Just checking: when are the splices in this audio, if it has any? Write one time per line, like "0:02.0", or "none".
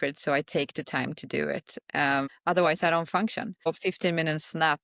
0:02.3
0:03.7